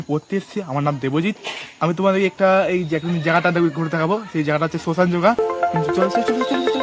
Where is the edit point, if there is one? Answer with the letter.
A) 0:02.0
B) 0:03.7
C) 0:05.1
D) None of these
D